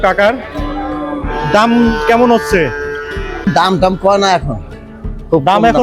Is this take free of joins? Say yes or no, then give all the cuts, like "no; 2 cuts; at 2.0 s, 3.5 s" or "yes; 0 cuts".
no; 1 cut; at 3.5 s